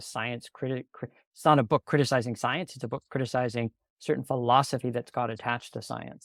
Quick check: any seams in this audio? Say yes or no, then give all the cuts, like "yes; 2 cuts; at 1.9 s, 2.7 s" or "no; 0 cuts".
no; 0 cuts